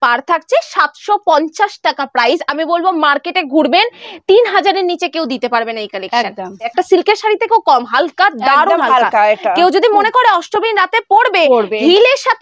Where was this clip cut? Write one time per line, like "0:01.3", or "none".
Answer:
0:06.7